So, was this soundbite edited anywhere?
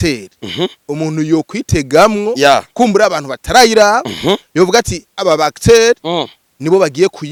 no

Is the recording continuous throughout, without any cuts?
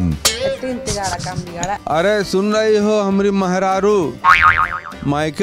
no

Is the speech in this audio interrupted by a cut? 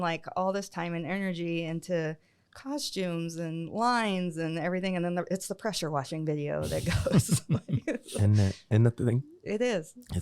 no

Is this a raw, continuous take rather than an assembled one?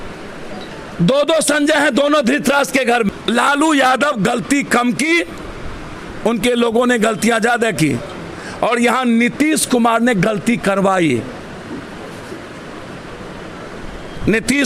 no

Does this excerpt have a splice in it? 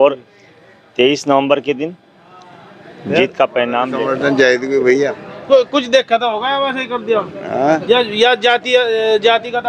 yes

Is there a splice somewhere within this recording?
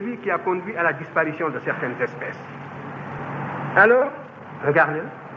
yes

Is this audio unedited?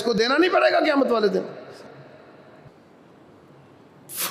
no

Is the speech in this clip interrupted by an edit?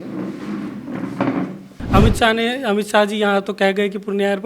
yes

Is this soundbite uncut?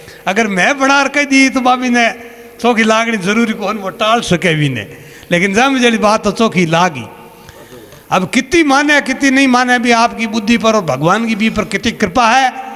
yes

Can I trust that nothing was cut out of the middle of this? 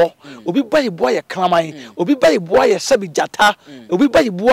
yes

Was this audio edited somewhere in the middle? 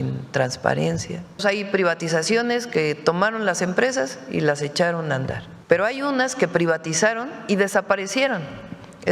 yes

